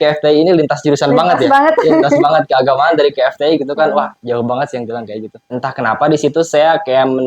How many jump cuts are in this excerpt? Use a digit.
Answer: 1